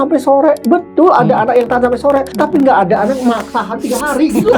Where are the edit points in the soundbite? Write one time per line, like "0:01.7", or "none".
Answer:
0:02.3